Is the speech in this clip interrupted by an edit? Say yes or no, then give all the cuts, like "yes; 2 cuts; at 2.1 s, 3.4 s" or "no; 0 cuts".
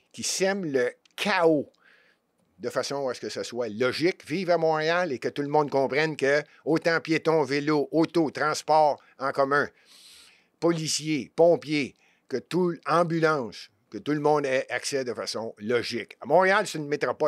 no; 0 cuts